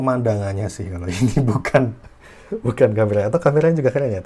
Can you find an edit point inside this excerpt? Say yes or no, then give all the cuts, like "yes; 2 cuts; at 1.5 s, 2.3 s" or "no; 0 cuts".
no; 0 cuts